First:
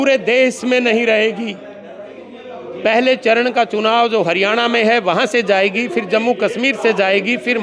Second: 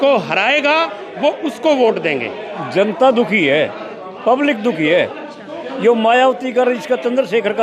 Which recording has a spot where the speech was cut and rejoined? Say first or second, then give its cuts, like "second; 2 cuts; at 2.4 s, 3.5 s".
second; 1 cut; at 2.5 s